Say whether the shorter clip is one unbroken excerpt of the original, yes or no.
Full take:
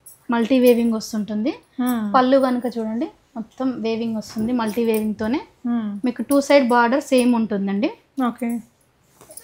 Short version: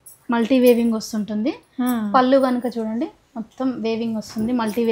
yes